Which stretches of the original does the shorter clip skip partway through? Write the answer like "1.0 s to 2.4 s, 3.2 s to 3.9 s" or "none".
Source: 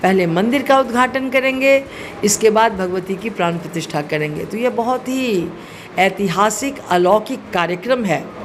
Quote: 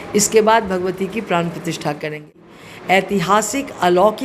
4.5 s to 5.5 s

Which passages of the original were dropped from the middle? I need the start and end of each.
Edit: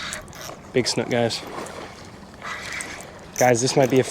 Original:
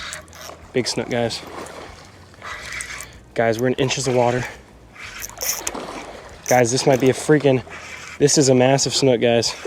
2.9 s to 6.0 s

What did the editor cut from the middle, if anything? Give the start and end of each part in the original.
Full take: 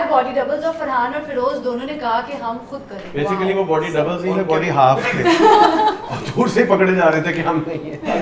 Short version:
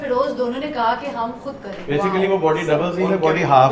none

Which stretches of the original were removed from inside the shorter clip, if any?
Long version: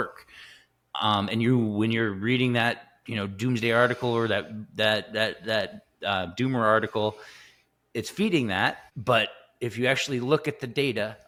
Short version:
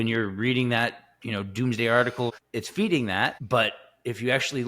4.1 s to 7.7 s, 8.8 s to 9.0 s

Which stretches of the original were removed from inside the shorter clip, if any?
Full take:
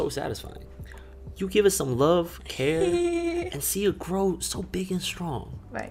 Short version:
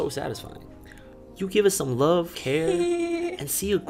2.4 s to 2.5 s

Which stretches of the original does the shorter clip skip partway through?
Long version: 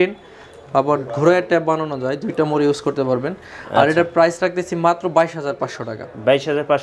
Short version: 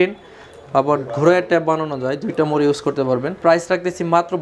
3.4 s to 4.1 s

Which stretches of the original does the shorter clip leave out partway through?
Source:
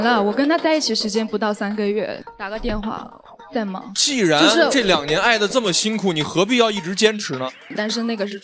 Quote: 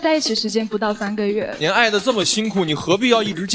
2.2 s to 5.1 s

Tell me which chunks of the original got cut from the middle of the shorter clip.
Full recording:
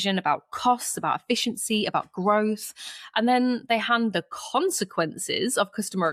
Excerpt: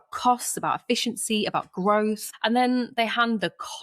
2.7 s to 3.0 s

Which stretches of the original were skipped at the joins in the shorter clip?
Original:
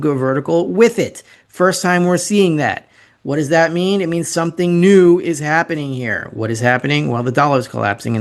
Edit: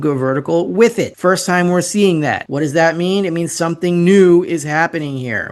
1.1 s to 1.5 s, 2.8 s to 3.2 s

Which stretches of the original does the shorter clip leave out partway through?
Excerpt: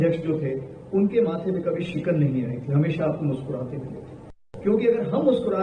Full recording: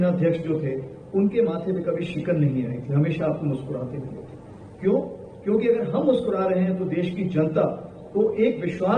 4.6 s to 5.2 s

